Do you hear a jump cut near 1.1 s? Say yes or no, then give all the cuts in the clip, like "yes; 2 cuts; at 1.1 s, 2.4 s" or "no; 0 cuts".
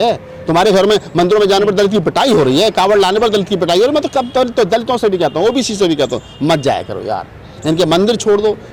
no; 0 cuts